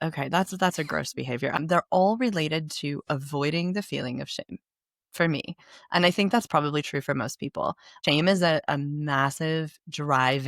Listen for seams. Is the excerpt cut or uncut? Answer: cut